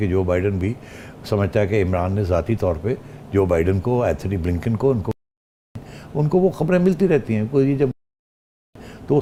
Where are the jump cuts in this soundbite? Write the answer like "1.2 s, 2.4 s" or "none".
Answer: none